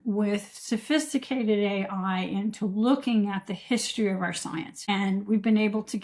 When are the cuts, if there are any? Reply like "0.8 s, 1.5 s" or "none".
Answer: 4.7 s